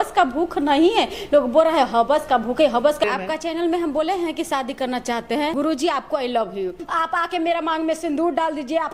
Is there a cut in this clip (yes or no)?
yes